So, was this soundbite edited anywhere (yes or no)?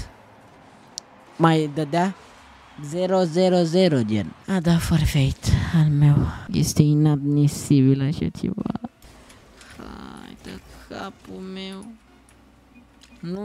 yes